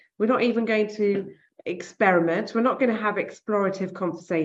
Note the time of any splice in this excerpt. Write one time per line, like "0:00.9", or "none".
none